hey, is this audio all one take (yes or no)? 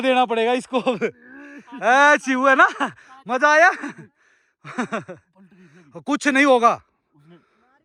yes